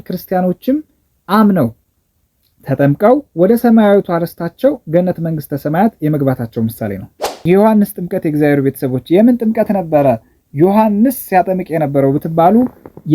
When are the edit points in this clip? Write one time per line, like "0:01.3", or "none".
0:07.4